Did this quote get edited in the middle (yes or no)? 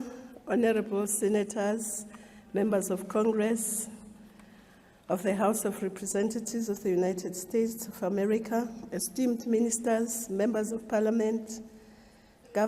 yes